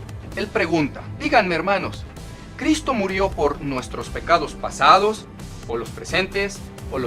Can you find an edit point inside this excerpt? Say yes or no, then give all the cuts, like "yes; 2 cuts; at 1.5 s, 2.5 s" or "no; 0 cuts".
yes; 1 cut; at 1.1 s